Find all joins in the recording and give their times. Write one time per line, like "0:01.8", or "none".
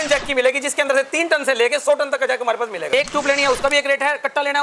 0:02.8